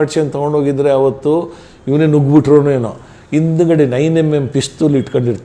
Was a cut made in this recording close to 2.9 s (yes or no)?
no